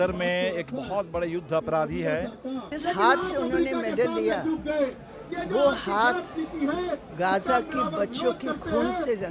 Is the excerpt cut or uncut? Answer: cut